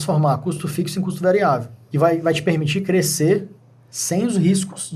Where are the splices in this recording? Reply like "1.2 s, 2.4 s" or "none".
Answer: 1.8 s